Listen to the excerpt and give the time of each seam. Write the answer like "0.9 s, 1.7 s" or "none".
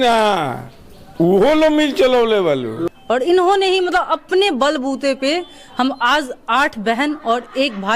2.8 s